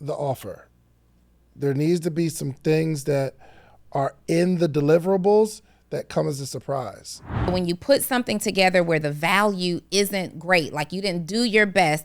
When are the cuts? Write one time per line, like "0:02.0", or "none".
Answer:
0:07.5